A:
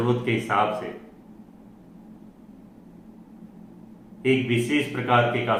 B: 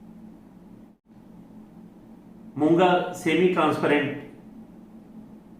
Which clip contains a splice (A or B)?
B